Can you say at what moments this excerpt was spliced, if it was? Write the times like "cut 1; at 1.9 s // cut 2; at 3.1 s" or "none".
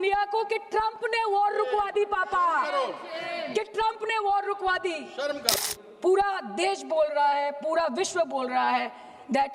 cut 1; at 5.5 s